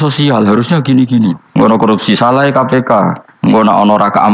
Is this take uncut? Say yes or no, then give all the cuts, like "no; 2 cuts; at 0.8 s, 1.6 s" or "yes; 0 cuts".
no; 2 cuts; at 1.7 s, 3.2 s